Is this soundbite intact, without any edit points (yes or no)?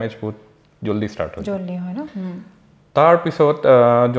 yes